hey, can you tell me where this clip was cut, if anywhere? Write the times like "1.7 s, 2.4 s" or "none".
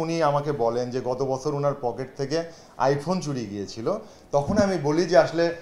none